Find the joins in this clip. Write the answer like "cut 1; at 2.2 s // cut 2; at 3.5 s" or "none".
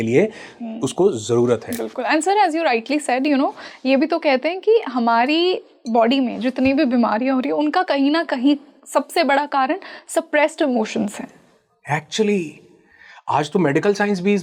none